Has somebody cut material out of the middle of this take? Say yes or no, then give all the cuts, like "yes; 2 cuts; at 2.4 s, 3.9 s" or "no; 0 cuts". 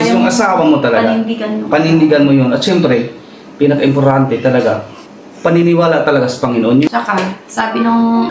no; 0 cuts